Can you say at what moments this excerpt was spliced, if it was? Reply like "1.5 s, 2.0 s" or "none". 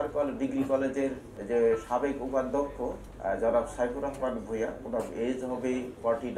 1.3 s, 3.1 s